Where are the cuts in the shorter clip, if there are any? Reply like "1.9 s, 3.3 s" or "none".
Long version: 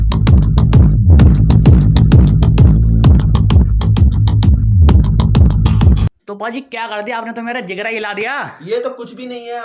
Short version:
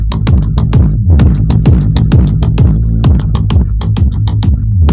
none